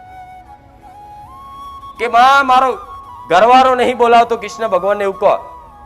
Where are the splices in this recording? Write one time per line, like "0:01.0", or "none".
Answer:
0:02.0